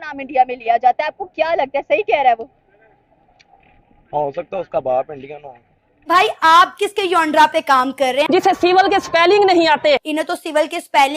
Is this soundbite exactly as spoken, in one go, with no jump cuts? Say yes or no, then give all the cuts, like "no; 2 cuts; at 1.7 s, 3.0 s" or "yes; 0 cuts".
no; 3 cuts; at 6.0 s, 8.3 s, 10.1 s